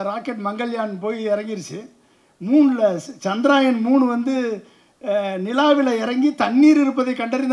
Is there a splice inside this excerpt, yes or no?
no